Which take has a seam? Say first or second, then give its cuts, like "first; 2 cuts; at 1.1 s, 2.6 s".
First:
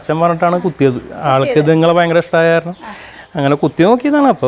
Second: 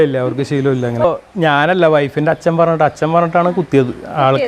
second; 1 cut; at 1.0 s